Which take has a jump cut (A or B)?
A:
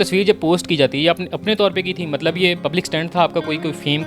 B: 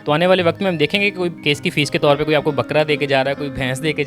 A